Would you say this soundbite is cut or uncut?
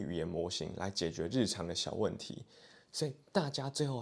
uncut